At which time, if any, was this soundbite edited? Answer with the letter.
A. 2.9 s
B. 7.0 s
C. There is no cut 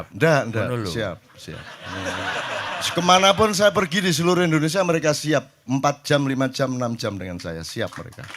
C